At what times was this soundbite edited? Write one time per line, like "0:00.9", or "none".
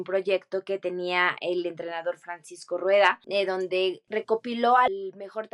0:03.2
0:04.0
0:04.9

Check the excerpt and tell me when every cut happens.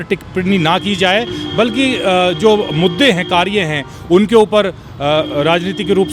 none

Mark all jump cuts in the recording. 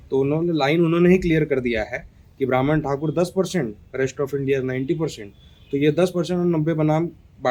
none

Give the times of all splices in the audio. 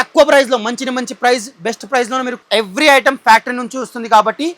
0:02.4

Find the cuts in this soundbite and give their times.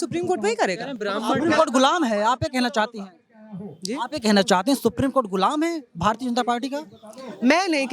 none

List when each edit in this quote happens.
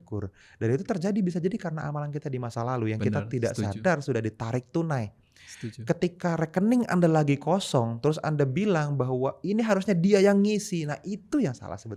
none

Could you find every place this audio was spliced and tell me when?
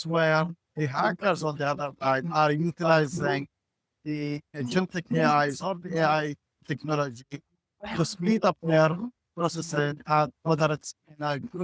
none

